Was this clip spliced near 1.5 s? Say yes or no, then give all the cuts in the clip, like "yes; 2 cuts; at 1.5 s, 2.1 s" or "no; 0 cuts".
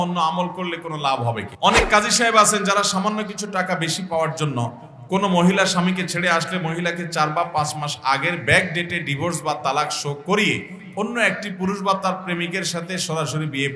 yes; 1 cut; at 1.5 s